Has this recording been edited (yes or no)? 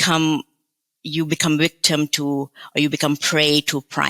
no